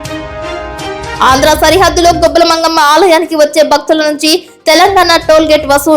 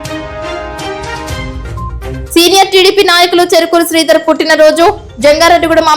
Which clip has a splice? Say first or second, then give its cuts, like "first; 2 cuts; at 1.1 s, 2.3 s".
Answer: first; 1 cut; at 1.2 s